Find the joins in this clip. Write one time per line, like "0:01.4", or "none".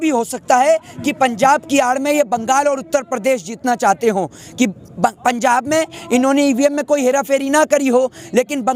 none